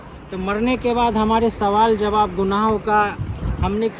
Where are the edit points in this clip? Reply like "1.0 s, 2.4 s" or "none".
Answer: none